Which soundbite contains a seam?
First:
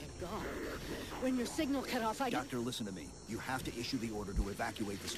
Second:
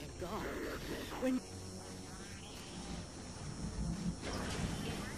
first; 1 cut; at 1.4 s

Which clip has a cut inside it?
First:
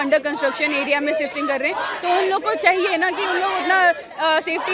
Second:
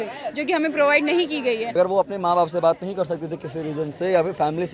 second; 1 cut; at 1.7 s

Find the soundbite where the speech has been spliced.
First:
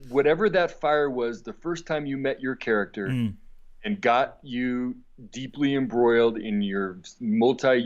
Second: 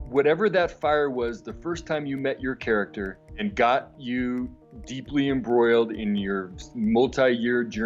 second; 1 cut; at 3.0 s

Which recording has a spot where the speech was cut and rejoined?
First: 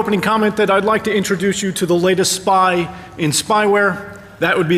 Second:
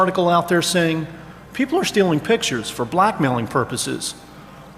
second; 1 cut; at 3.8 s

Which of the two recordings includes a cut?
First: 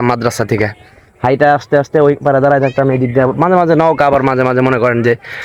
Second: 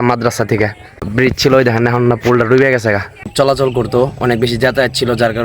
second; 2 cuts; at 1.1 s, 3.2 s

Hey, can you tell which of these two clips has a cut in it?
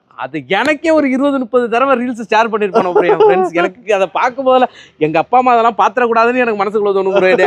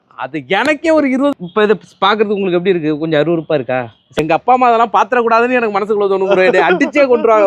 second; 2 cuts; at 1.3 s, 4.2 s

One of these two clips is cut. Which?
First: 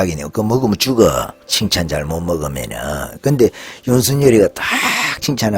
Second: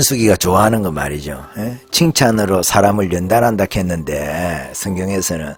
first; 1 cut; at 1.4 s

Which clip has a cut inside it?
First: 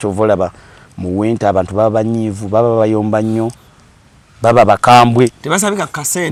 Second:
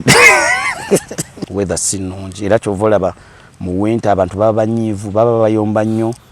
second; 1 cut; at 1.5 s

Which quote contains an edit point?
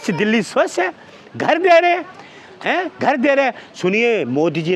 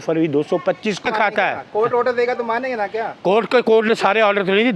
second; 1 cut; at 1.0 s

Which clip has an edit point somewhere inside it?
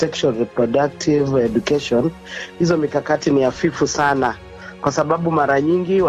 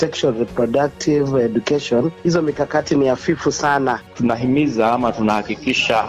second; 2 cuts; at 2.2 s, 4.1 s

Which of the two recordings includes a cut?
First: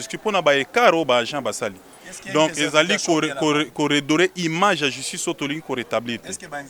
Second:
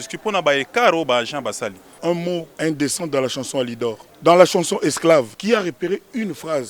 second; 3 cuts; at 2.2 s, 4.1 s, 5.3 s

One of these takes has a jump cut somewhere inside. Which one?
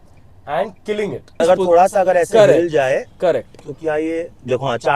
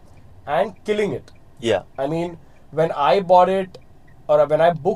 first; 1 cut; at 1.4 s

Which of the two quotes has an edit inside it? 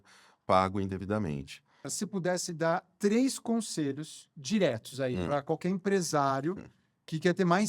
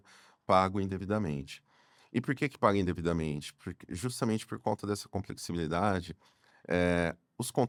first; 1 cut; at 1.9 s

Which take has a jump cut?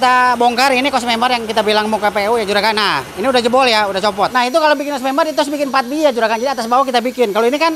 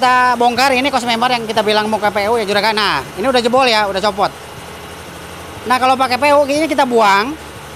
first; 1 cut; at 4.3 s

